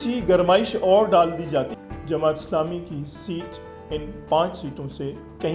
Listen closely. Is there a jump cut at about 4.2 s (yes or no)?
no